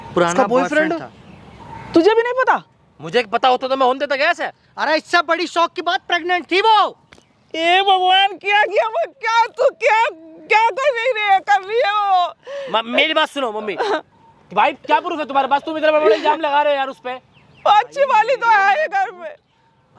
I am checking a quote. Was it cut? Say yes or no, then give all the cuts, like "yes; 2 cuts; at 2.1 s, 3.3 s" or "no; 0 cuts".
no; 0 cuts